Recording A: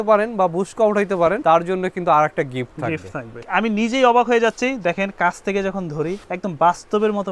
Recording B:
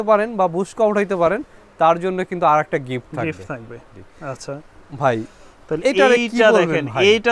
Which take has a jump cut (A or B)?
A